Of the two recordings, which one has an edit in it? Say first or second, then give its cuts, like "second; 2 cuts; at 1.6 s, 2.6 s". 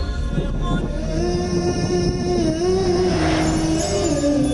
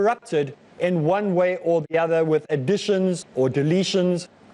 first; 1 cut; at 1.9 s